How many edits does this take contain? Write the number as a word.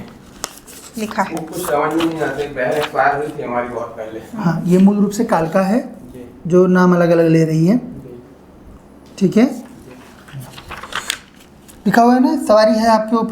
zero